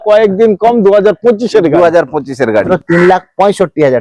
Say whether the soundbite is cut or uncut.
cut